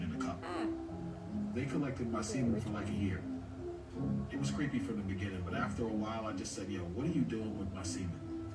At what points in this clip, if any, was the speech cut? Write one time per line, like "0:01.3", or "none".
none